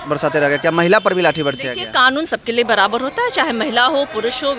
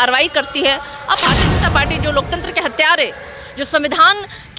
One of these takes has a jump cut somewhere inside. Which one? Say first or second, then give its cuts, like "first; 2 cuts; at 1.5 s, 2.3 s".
second; 1 cut; at 1.2 s